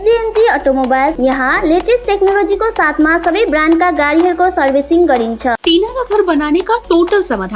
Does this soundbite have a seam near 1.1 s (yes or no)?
yes